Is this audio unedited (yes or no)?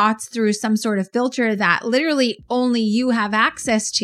yes